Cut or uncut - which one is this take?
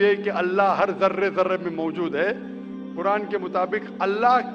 uncut